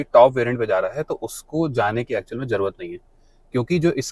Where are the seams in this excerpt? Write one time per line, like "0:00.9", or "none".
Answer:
none